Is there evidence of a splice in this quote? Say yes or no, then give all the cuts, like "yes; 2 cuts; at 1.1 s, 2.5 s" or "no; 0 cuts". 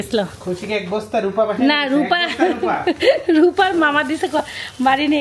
no; 0 cuts